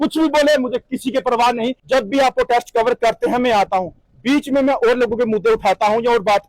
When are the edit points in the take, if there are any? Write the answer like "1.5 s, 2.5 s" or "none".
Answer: 1.8 s

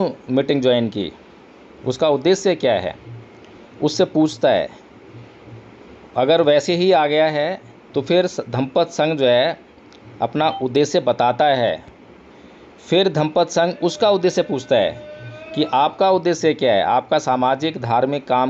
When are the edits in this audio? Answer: none

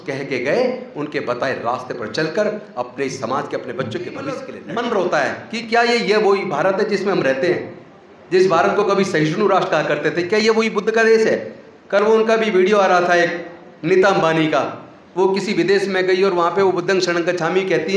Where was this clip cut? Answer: 4.5 s

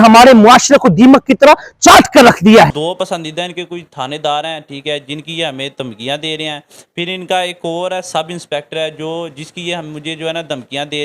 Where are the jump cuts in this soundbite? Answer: 2.7 s

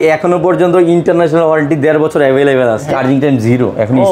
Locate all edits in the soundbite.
2.9 s

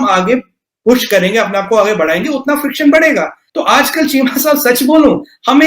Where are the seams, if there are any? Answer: 3.4 s

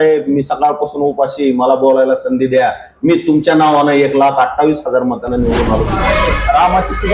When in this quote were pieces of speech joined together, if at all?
6.0 s

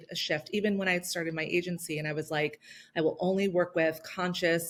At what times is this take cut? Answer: none

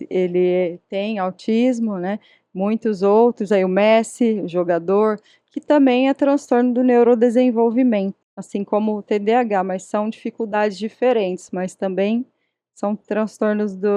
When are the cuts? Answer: none

